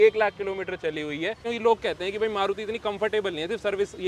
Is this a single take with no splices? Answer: no; 1 cut; at 1.5 s

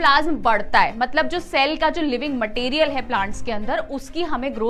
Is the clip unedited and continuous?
yes; 0 cuts

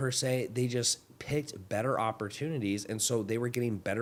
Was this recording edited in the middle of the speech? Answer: no; 0 cuts

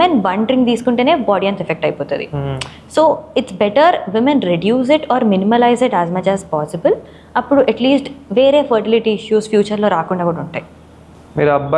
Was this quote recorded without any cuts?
yes; 0 cuts

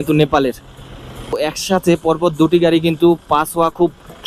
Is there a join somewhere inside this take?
yes; 1 cut; at 1.3 s

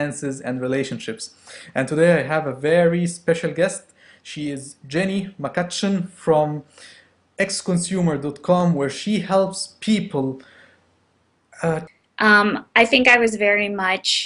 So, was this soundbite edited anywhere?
no; 0 cuts

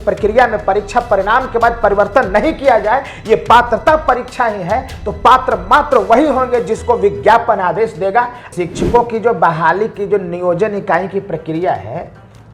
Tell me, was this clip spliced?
yes; 1 cut; at 8.5 s

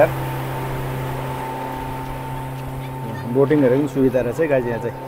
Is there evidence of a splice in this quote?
no; 0 cuts

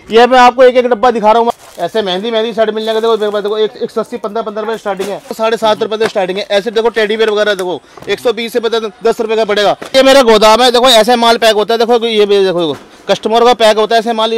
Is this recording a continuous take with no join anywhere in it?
no; 3 cuts; at 1.5 s, 5.4 s, 9.8 s

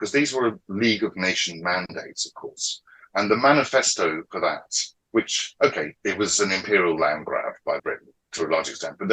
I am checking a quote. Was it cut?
yes; 1 cut; at 7.7 s

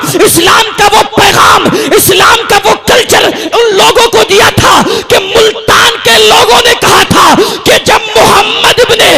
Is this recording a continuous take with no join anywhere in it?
yes; 0 cuts

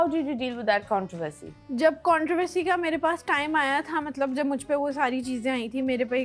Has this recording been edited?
no; 0 cuts

